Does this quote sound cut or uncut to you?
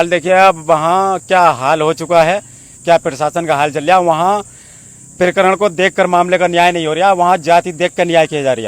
uncut